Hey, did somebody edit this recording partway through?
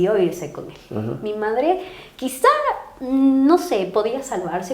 no; 0 cuts

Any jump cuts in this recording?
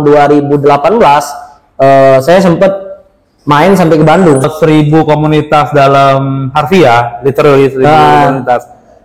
yes; 1 cut; at 4.5 s

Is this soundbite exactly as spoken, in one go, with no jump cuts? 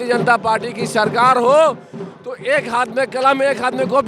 yes; 0 cuts

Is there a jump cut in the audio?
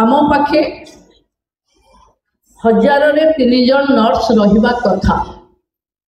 no; 0 cuts

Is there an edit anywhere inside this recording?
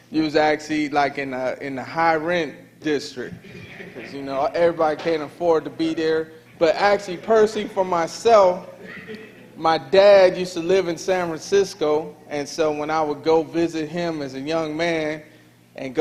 no; 0 cuts

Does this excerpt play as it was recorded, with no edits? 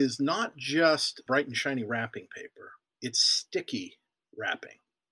no; 2 cuts; at 1.2 s, 2.8 s

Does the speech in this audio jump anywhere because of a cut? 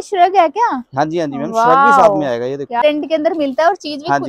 yes; 1 cut; at 2.8 s

